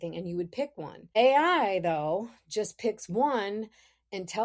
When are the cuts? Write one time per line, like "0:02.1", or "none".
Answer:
0:01.2

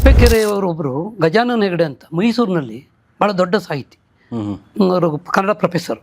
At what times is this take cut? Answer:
none

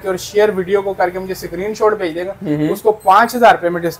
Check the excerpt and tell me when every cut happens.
none

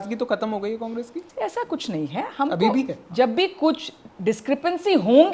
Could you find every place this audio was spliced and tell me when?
0:01.2
0:03.1

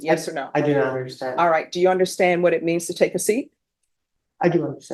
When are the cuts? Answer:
none

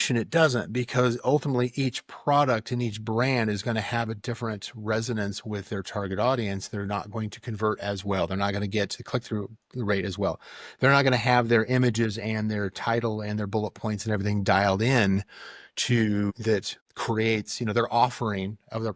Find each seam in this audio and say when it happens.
0:16.3

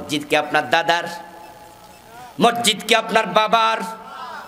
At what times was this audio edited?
none

